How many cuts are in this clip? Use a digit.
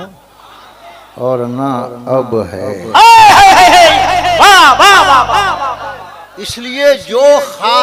0